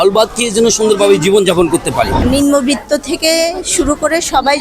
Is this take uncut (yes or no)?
no